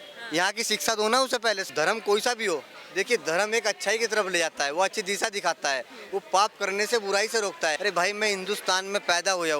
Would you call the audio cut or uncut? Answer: cut